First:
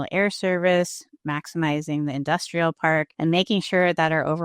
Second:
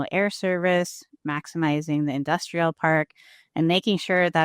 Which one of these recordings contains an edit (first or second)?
first